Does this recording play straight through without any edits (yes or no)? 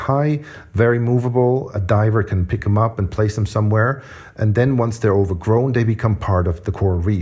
no